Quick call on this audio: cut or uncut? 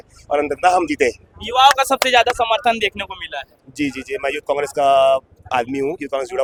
uncut